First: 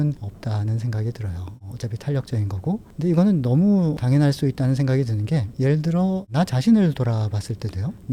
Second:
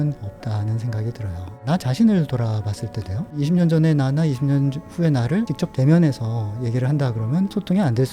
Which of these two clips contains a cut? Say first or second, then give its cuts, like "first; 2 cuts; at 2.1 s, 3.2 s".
second; 2 cuts; at 1.6 s, 3.3 s